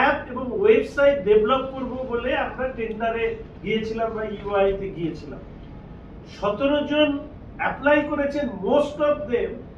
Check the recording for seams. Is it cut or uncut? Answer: uncut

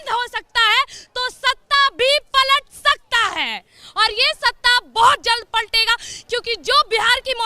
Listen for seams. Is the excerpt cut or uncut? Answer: uncut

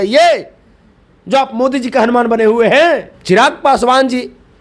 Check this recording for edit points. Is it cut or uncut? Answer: cut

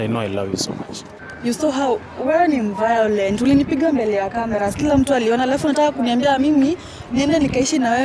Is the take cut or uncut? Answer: cut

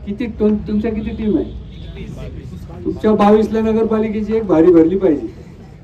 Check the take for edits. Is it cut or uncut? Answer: uncut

